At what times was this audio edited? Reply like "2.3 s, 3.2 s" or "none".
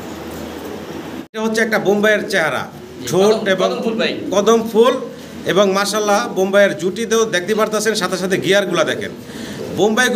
1.4 s